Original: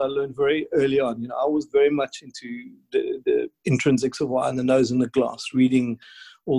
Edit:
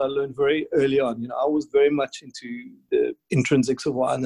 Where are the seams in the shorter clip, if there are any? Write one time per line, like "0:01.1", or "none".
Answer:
0:02.8